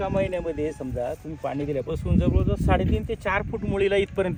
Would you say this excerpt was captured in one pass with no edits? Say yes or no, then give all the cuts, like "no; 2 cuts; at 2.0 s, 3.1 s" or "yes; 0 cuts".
yes; 0 cuts